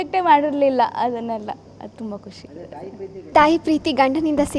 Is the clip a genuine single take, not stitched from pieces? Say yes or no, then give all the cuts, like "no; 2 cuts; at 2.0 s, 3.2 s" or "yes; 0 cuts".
no; 1 cut; at 3.3 s